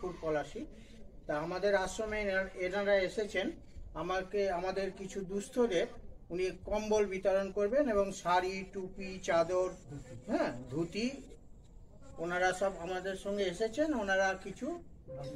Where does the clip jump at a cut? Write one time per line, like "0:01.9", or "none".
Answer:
none